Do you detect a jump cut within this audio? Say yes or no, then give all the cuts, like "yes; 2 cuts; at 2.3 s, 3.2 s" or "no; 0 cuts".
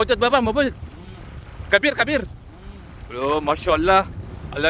no; 0 cuts